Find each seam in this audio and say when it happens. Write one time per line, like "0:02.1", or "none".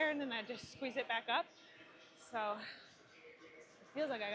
none